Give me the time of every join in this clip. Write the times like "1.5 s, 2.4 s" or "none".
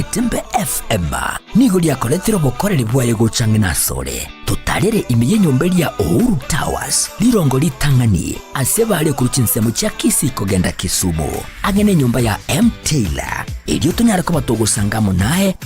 2.2 s